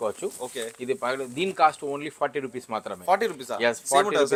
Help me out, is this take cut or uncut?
uncut